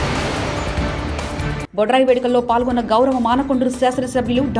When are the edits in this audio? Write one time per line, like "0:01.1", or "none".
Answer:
none